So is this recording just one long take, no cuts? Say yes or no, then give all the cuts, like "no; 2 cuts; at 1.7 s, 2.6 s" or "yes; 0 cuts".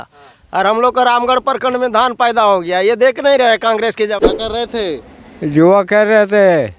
no; 1 cut; at 4.1 s